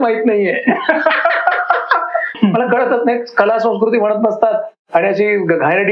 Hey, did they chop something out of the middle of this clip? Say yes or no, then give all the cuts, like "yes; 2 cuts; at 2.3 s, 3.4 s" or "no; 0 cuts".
yes; 1 cut; at 2.3 s